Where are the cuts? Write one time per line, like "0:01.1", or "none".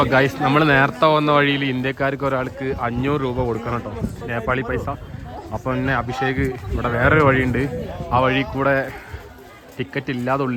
none